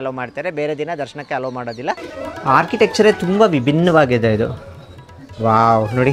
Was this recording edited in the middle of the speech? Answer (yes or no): yes